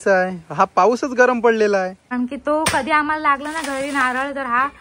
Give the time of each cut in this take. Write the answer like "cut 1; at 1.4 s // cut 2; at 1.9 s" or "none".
cut 1; at 2.1 s